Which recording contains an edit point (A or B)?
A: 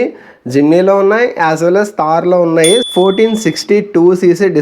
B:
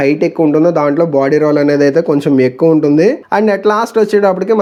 A